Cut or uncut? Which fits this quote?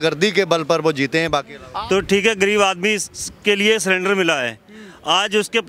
cut